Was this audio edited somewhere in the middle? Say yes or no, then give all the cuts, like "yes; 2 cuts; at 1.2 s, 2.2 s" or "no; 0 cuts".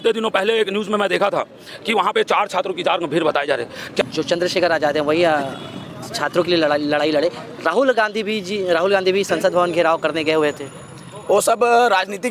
yes; 1 cut; at 4.0 s